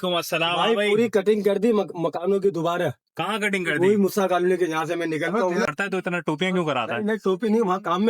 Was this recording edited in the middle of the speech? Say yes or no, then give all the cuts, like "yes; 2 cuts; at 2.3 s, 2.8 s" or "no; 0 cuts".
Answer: yes; 1 cut; at 5.7 s